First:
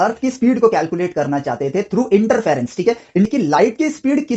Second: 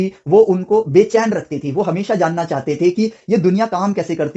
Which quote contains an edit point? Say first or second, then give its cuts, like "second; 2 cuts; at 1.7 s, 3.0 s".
first; 1 cut; at 3.3 s